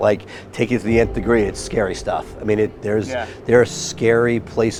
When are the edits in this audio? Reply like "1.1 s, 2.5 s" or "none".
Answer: none